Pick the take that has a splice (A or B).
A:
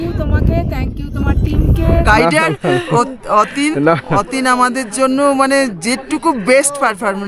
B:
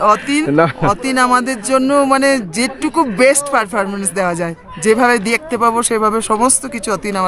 A